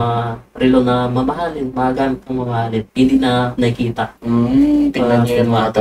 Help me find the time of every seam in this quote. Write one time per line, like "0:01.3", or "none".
none